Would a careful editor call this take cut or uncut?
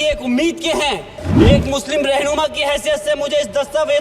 cut